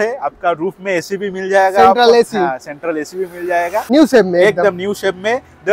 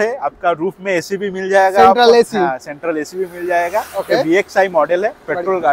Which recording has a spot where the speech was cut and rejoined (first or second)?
first